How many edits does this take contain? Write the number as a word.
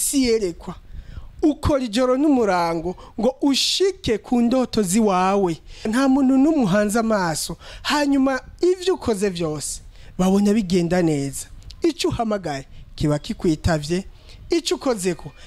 one